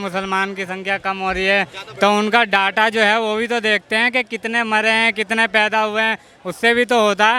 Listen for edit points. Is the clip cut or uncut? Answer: uncut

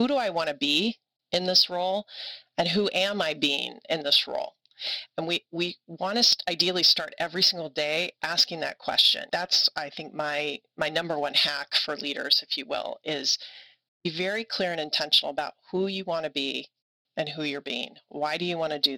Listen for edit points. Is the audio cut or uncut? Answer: uncut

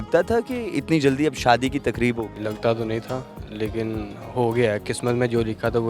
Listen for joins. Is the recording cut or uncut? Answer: cut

